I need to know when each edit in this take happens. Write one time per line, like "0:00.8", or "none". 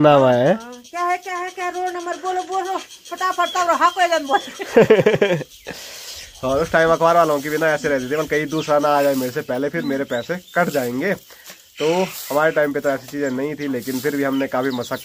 none